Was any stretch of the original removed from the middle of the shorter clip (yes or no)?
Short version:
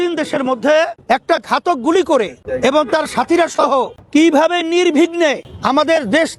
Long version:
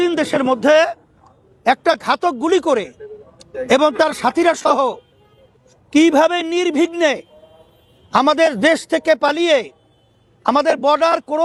yes